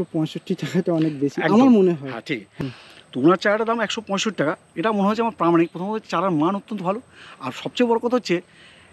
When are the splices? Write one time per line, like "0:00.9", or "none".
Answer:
0:02.4